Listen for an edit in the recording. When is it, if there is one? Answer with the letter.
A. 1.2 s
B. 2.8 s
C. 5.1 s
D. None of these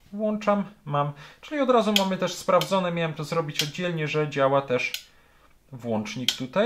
D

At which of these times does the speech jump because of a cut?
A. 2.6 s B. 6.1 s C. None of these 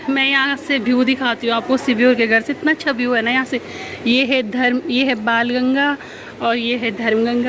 C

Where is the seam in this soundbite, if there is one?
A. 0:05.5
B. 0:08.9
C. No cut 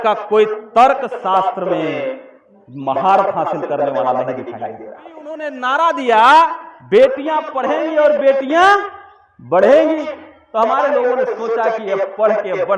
A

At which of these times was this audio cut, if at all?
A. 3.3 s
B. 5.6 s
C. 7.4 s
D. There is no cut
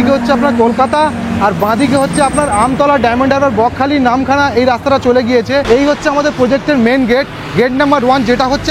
B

